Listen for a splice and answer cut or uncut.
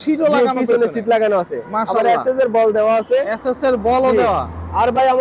uncut